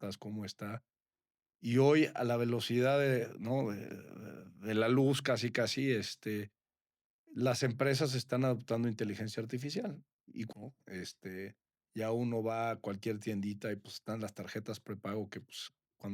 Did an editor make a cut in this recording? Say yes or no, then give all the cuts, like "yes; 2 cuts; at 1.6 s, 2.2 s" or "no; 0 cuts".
yes; 1 cut; at 10.5 s